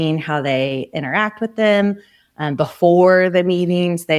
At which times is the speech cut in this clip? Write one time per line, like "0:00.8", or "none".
none